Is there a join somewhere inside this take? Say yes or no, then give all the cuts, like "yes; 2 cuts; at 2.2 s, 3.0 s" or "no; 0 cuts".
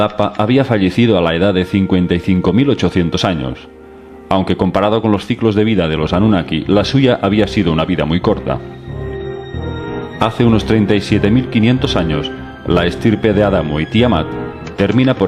no; 0 cuts